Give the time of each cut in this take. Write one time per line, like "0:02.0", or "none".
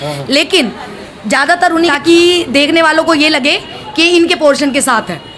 0:01.9